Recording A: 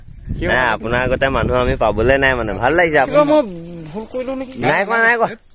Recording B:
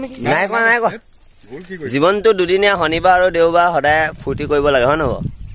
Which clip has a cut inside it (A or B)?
A